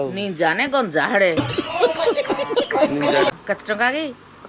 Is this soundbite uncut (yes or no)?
no